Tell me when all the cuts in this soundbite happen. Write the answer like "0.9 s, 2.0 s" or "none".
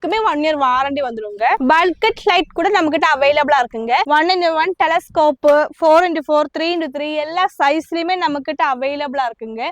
4.1 s